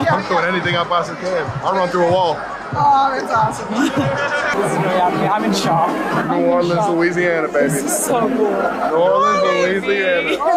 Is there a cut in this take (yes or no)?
no